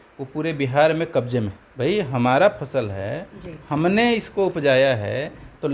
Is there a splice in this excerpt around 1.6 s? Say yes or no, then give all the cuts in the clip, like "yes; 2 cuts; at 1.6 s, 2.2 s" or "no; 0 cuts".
yes; 1 cut; at 1.6 s